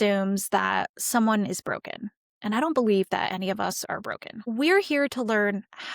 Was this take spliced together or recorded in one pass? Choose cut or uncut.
cut